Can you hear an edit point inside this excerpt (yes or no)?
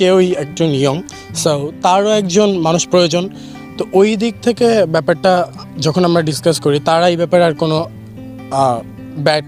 no